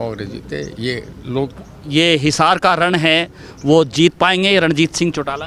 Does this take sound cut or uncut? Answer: cut